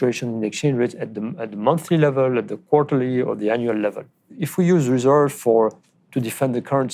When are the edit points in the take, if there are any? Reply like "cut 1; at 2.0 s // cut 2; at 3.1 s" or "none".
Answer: cut 1; at 4.4 s